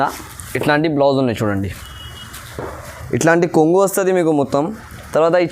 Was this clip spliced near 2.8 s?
yes; 1 cut; at 2.8 s

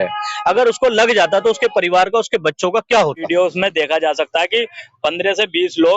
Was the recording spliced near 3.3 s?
yes; 1 cut; at 3.3 s

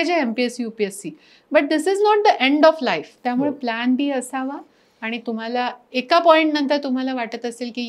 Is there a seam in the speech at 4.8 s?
no; 1 cut; at 3.1 s

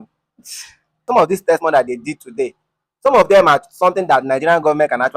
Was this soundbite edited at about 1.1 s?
yes; 1 cut; at 1.1 s

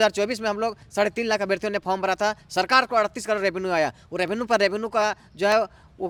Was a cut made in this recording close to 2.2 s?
no; 0 cuts

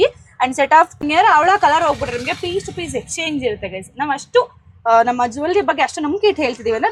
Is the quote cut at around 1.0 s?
yes; 1 cut; at 1.0 s

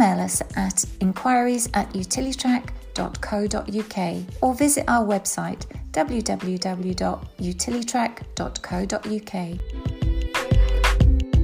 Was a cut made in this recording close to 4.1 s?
no; 1 cut; at 9.6 s

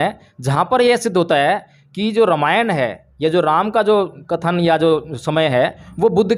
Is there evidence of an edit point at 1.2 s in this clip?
no; 0 cuts

